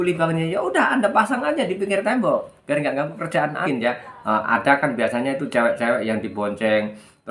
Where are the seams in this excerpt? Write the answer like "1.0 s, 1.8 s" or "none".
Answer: 3.6 s